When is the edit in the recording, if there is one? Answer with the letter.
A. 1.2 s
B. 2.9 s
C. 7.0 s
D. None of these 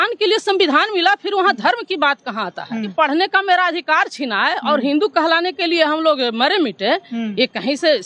B